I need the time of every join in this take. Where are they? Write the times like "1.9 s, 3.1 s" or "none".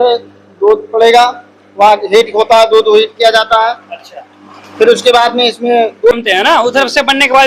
6.1 s